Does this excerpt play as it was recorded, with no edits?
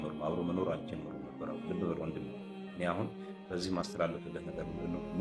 yes; 0 cuts

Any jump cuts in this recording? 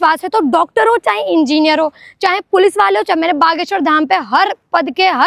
no; 0 cuts

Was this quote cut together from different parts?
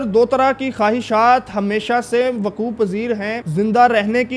yes; 1 cut; at 3.4 s

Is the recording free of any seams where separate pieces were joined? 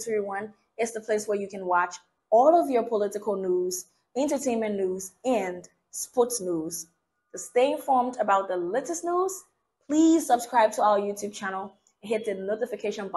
yes; 0 cuts

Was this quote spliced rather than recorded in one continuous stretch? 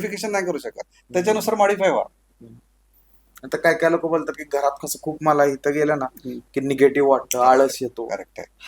no; 0 cuts

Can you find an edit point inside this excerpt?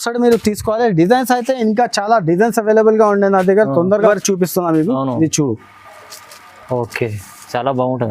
yes; 1 cut; at 4.1 s

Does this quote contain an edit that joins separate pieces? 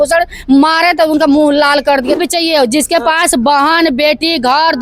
yes; 1 cut; at 2.2 s

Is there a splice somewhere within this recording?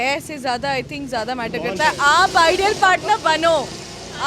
no; 0 cuts

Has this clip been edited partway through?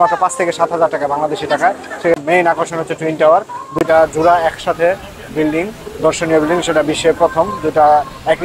yes; 1 cut; at 2.2 s

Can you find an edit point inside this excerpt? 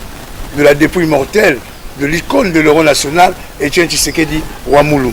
no; 0 cuts

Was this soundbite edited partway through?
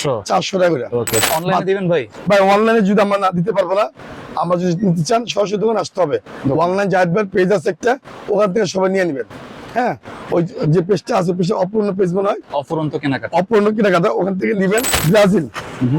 yes; 2 cuts; at 1.2 s, 14.9 s

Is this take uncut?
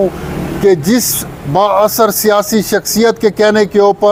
yes; 0 cuts

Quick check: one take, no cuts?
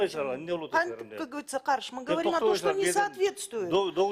yes; 0 cuts

